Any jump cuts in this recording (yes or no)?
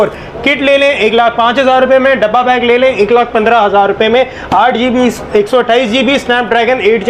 no